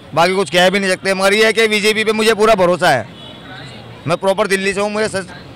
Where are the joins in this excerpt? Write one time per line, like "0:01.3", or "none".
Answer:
none